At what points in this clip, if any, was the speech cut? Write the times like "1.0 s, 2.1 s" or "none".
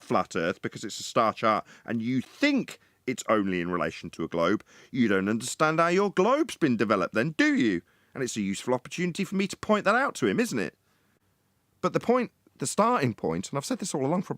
10.9 s